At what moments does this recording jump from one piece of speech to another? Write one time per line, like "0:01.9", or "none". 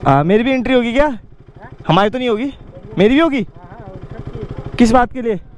none